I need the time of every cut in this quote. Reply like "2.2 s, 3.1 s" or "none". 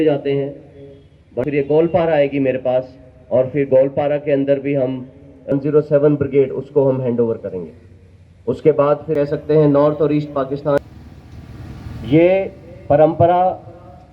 9.1 s